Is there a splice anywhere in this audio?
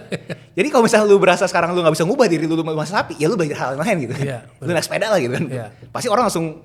no; 0 cuts

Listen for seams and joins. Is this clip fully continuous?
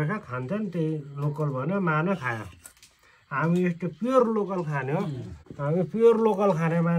yes; 0 cuts

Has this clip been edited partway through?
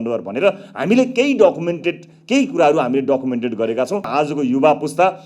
yes; 1 cut; at 4.1 s

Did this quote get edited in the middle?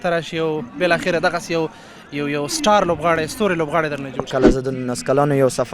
yes; 1 cut; at 4.2 s

